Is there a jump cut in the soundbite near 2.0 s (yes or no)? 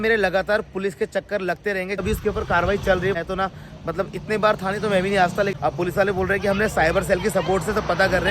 yes